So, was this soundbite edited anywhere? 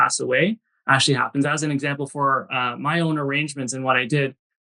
no; 0 cuts

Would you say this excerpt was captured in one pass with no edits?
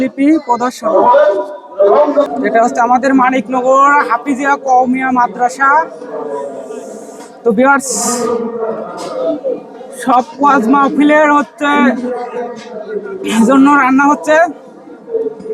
no; 1 cut; at 2.2 s

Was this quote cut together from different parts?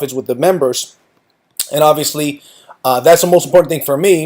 yes; 1 cut; at 1.1 s

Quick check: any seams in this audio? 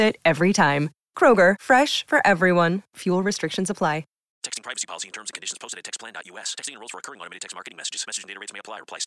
yes; 1 cut; at 4.2 s

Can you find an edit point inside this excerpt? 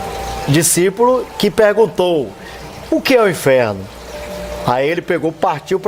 no; 0 cuts

